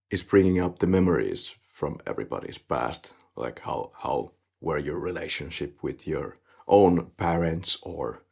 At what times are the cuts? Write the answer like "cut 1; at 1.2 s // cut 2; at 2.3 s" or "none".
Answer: none